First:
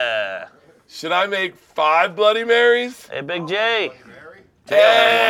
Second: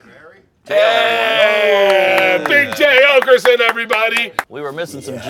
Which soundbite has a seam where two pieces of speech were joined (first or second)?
second